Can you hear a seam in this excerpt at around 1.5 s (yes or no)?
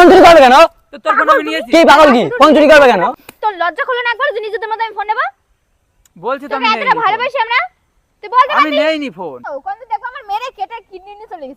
no